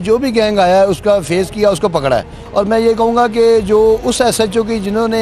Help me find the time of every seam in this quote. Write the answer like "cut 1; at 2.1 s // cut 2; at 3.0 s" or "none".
cut 1; at 2.4 s